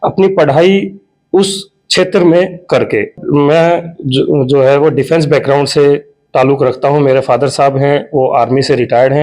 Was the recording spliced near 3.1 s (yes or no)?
yes